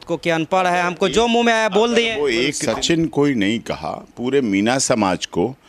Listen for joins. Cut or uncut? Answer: cut